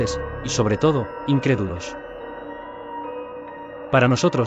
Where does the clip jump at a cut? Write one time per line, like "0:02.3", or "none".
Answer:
0:01.7
0:03.4